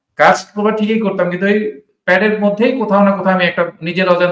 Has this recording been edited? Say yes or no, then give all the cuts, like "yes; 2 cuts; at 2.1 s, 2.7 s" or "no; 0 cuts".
no; 0 cuts